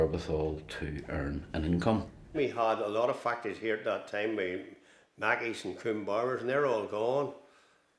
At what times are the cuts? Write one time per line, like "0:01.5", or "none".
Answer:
none